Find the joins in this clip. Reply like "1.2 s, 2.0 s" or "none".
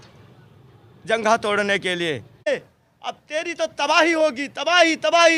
2.4 s